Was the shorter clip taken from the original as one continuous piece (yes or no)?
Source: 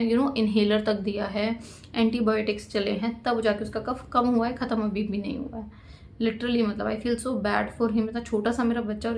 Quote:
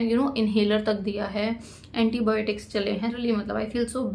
no